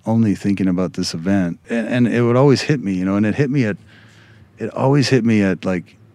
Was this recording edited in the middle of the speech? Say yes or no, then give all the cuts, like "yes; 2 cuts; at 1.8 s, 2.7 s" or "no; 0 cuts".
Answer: yes; 1 cut; at 1.6 s